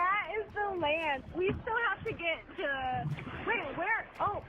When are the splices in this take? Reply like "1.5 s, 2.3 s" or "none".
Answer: 1.2 s, 3.3 s